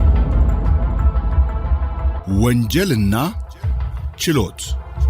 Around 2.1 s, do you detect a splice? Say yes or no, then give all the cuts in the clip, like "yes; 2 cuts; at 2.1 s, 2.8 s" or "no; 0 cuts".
yes; 1 cut; at 2.1 s